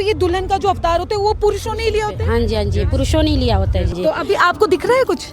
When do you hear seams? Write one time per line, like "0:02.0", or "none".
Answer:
0:03.9